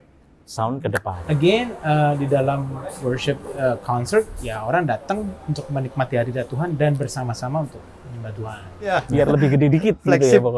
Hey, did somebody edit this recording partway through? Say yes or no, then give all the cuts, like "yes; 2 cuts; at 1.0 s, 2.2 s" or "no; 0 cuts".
yes; 2 cuts; at 1.1 s, 9.0 s